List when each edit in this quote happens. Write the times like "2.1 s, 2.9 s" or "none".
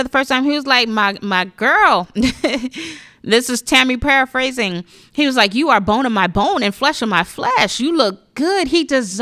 none